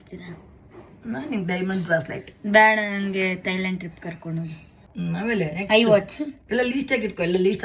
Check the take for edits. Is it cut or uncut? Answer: cut